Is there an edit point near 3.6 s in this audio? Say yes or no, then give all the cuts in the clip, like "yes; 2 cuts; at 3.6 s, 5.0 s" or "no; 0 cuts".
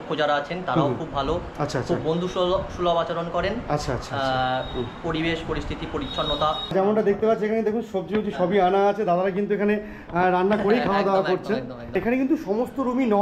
no; 2 cuts; at 6.7 s, 11.9 s